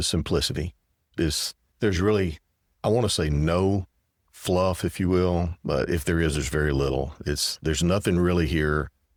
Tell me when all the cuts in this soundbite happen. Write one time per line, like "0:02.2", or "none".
none